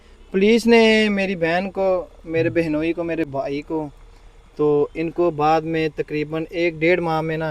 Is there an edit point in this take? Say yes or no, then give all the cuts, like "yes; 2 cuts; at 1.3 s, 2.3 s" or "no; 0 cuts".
no; 0 cuts